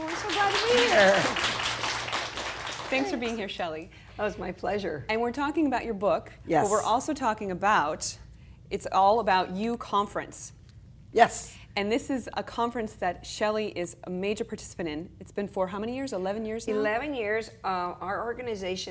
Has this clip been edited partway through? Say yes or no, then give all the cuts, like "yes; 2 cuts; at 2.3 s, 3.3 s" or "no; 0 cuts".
yes; 1 cut; at 17.3 s